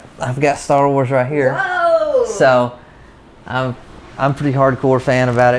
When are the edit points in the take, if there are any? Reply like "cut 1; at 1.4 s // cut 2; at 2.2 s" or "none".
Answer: none